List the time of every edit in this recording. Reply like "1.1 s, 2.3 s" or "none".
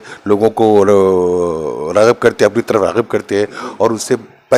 none